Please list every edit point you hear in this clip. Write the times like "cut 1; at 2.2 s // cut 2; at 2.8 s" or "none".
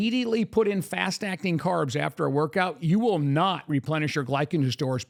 none